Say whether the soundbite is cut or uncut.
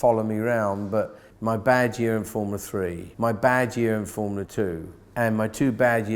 cut